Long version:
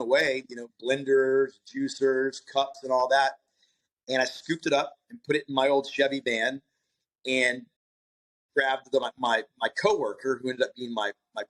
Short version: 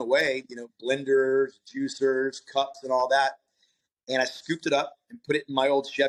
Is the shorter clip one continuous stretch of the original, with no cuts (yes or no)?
yes